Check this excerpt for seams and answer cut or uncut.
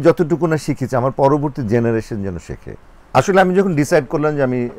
cut